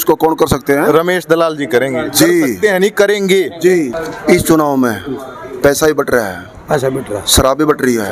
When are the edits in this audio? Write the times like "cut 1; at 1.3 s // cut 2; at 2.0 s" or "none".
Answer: cut 1; at 3.9 s

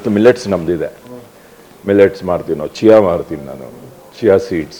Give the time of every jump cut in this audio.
none

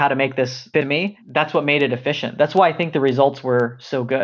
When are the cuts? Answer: cut 1; at 1.0 s

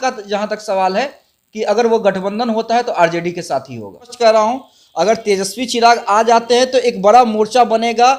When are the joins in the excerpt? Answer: cut 1; at 4.1 s

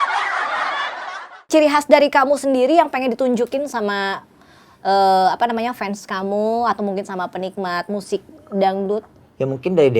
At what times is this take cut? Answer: cut 1; at 1.4 s

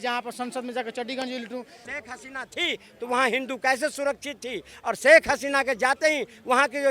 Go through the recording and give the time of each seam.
cut 1; at 1.9 s

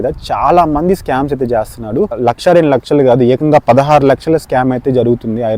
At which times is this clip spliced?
none

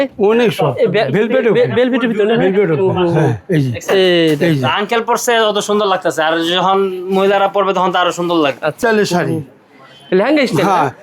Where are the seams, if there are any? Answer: cut 1; at 8.8 s

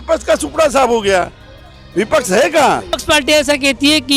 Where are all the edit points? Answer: cut 1; at 3.0 s

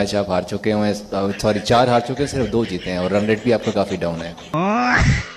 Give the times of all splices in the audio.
none

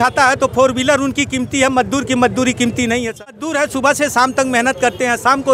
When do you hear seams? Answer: cut 1; at 3.4 s

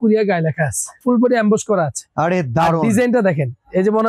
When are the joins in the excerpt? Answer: cut 1; at 1.0 s

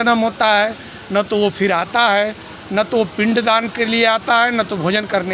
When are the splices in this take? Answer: none

